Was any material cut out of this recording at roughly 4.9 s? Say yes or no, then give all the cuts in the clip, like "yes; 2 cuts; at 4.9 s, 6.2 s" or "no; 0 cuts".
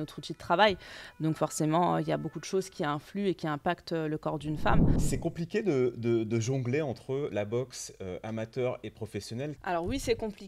yes; 2 cuts; at 4.9 s, 9.6 s